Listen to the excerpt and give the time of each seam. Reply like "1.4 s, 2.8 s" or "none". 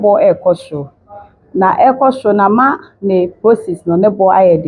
none